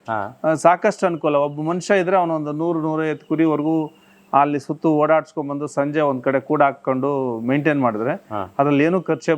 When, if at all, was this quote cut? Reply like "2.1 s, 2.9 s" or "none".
none